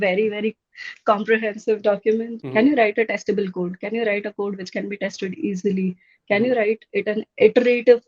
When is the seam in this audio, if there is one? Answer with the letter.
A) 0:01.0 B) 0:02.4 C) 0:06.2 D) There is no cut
B